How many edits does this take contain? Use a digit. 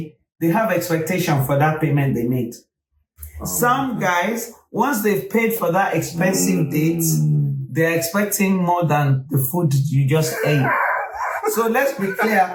0